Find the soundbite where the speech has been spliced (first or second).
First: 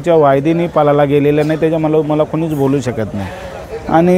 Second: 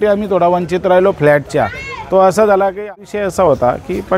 second